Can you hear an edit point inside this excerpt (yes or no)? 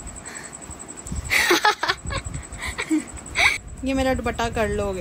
yes